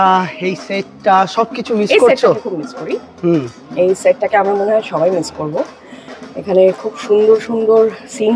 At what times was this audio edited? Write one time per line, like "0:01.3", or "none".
none